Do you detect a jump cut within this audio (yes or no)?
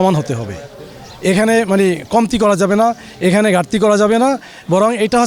no